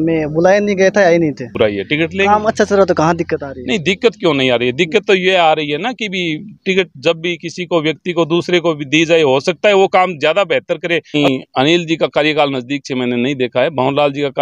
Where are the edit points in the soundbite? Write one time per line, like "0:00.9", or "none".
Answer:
0:01.5
0:11.1